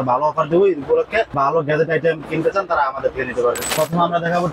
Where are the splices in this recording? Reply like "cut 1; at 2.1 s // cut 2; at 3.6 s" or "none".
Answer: cut 1; at 1.3 s // cut 2; at 3.6 s